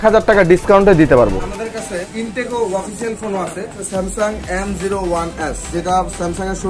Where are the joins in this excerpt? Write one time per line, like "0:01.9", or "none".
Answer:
0:01.3
0:03.8
0:05.6